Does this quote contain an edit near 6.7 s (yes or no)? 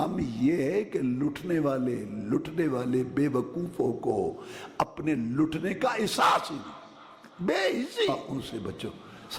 no